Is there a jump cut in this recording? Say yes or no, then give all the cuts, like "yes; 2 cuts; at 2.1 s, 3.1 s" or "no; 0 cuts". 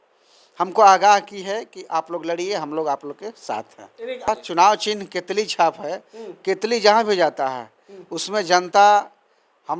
yes; 1 cut; at 4.3 s